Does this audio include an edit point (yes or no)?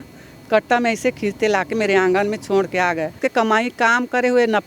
yes